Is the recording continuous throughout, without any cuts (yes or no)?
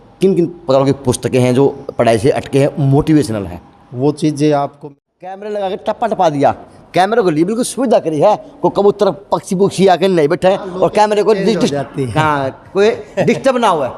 no